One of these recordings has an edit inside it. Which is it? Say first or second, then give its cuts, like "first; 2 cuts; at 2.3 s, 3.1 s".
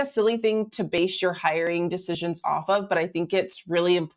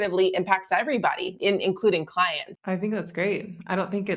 second; 2 cuts; at 1.3 s, 2.5 s